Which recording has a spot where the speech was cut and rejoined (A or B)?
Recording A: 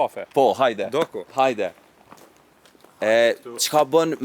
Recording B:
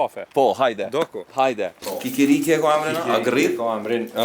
B